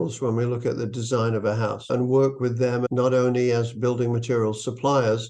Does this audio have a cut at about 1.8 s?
yes; 2 cuts; at 1.8 s, 2.9 s

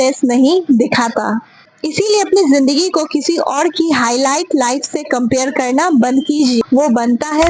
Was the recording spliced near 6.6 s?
yes; 1 cut; at 6.6 s

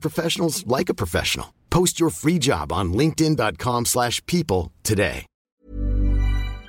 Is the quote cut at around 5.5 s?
yes; 1 cut; at 5.5 s

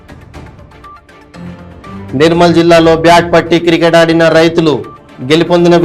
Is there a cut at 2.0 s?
yes; 1 cut; at 2.0 s

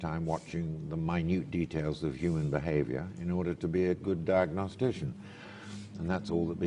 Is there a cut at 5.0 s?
yes; 1 cut; at 5.0 s

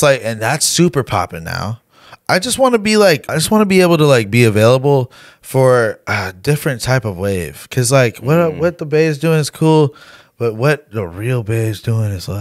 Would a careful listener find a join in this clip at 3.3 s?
yes; 1 cut; at 3.3 s

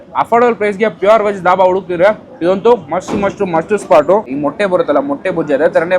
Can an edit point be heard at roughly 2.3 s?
no; 1 cut; at 4.3 s

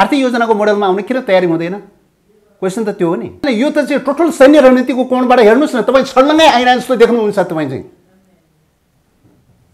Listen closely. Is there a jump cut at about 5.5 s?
no; 1 cut; at 3.4 s

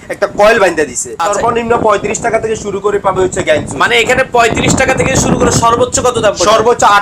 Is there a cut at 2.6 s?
no; 1 cut; at 1.1 s

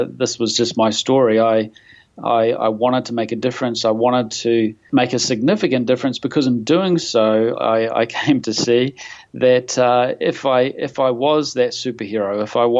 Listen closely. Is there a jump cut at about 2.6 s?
no; 1 cut; at 4.8 s

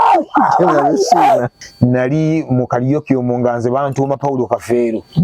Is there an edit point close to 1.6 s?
yes; 1 cut; at 1.6 s

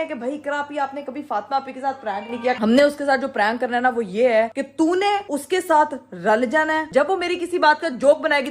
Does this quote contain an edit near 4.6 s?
no; 2 cuts; at 2.6 s, 6.9 s

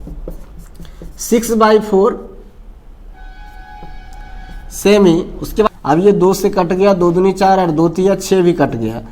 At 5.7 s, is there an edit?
yes; 1 cut; at 5.7 s

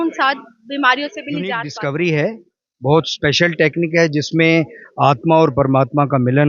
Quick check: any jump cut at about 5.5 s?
no; 1 cut; at 1.7 s

